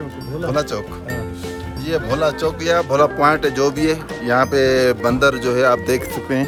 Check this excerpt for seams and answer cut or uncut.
uncut